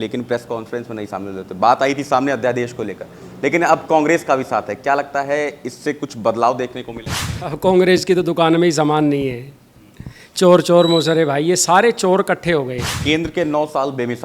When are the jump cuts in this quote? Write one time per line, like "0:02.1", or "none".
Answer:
0:12.9